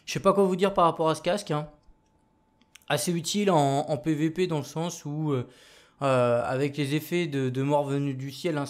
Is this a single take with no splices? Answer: no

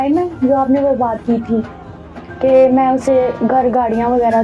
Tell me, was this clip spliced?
no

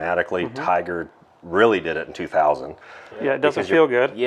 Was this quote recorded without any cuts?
no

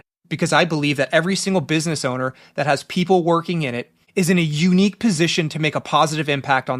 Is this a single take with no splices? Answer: yes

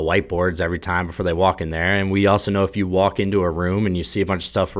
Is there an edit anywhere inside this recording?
no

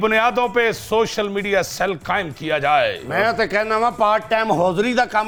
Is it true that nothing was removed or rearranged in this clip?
yes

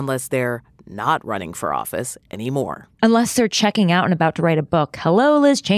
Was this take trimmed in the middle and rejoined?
yes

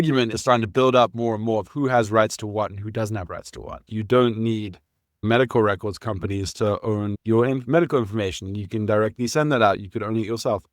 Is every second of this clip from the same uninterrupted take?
no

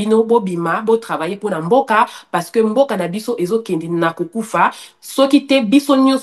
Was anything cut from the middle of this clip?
no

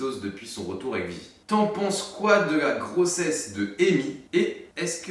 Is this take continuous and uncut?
no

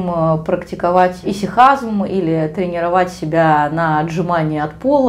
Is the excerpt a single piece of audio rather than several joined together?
no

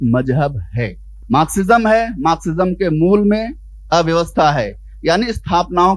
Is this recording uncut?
no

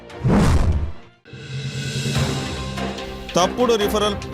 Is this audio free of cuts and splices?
no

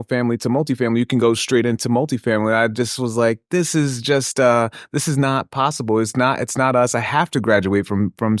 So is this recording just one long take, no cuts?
yes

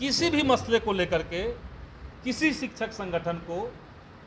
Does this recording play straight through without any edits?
yes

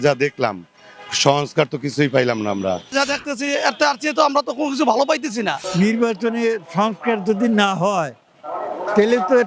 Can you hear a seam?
yes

